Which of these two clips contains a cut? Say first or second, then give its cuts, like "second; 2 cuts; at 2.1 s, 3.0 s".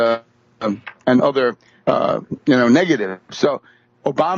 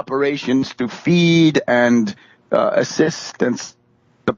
first; 1 cut; at 2.8 s